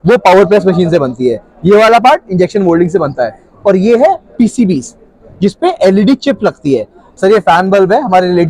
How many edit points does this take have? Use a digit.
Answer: 1